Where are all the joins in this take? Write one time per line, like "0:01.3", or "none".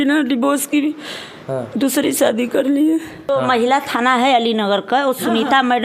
0:03.3